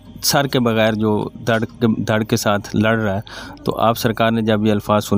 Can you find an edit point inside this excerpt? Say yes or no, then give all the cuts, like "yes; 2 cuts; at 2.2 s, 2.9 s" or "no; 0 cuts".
no; 0 cuts